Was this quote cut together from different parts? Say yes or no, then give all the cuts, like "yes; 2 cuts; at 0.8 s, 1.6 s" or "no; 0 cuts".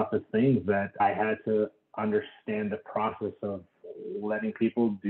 yes; 1 cut; at 1.0 s